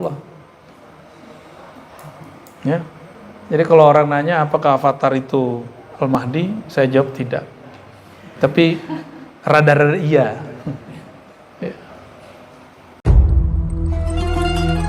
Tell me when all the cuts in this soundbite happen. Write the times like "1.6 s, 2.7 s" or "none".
12.9 s